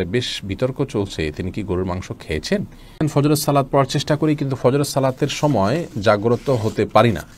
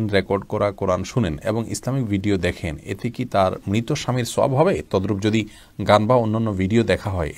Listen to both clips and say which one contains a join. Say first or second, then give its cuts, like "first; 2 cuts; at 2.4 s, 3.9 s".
first; 1 cut; at 3.0 s